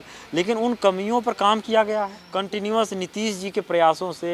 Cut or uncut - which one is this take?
cut